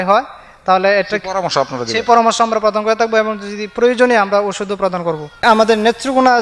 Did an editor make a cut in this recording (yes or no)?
yes